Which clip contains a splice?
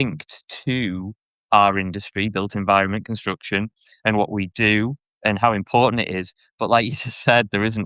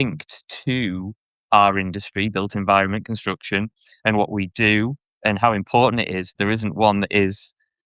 second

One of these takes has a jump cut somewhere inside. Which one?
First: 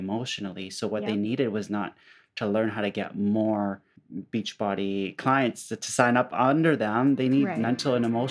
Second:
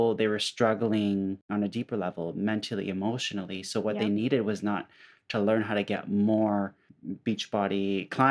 second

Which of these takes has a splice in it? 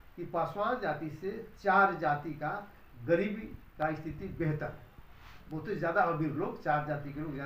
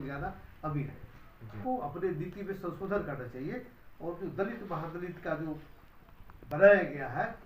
second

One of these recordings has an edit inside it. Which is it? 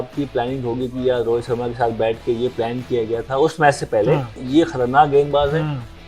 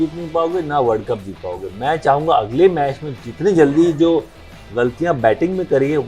first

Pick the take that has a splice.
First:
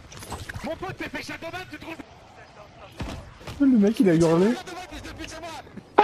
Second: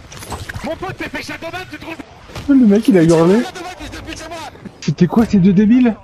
second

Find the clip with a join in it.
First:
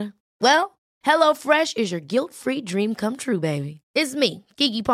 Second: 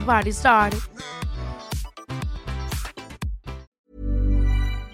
second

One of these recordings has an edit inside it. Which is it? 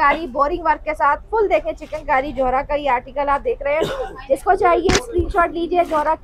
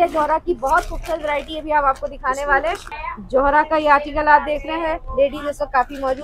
second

